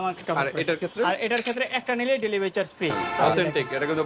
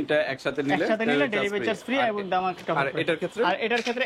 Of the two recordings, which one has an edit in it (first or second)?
first